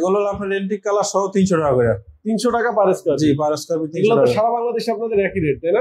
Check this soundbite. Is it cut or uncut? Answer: uncut